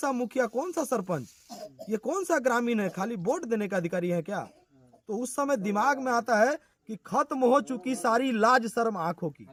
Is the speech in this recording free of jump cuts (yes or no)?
yes